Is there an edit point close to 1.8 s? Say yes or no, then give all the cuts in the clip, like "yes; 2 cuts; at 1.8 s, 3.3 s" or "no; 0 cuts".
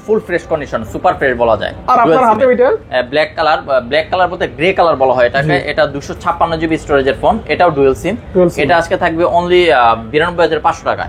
no; 0 cuts